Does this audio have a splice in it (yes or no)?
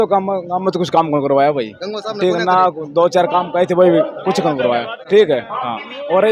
no